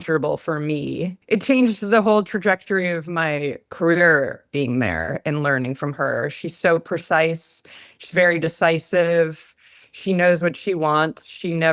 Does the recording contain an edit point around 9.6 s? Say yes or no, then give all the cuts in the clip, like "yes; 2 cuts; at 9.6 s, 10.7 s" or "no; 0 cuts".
no; 1 cut; at 1.2 s